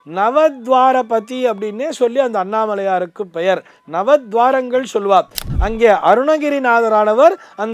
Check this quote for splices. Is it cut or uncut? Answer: cut